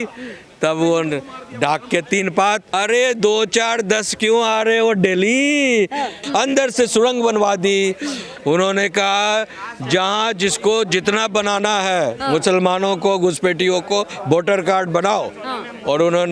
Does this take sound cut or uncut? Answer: cut